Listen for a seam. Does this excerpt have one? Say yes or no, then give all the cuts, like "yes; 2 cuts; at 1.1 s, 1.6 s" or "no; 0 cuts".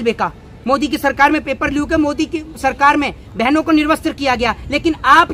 no; 0 cuts